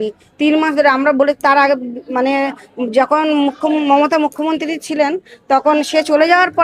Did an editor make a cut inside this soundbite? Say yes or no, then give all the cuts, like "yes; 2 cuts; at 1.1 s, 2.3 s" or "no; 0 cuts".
no; 0 cuts